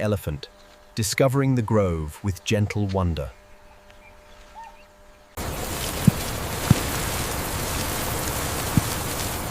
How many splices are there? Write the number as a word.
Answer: one